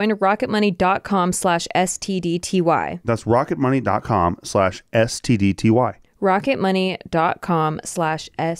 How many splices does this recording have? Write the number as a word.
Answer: one